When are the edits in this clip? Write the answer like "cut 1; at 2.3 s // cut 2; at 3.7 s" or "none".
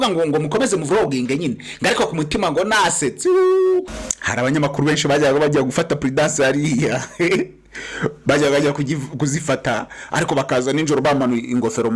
cut 1; at 4.0 s